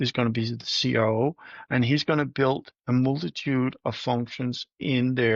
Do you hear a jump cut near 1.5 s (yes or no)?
no